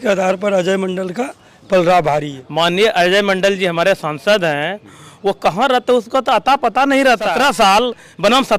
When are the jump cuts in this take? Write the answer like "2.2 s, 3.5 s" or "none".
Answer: 2.4 s, 7.3 s